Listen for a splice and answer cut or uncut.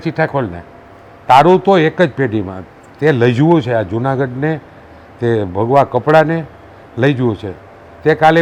uncut